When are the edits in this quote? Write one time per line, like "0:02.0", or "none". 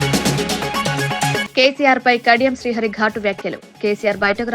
0:01.4